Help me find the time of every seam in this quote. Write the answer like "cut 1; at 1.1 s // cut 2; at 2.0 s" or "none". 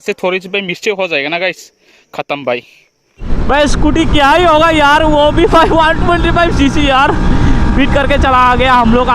cut 1; at 3.3 s